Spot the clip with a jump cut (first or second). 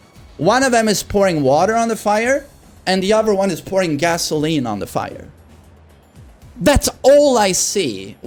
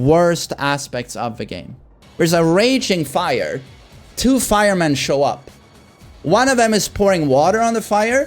second